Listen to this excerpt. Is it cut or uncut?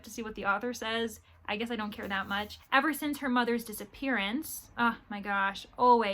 cut